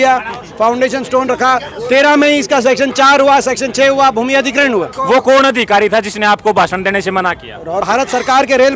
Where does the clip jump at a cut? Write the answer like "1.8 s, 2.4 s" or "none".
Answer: 5.0 s, 7.8 s